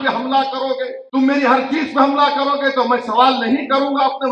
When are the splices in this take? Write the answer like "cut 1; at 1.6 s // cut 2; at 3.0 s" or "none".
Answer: cut 1; at 1.0 s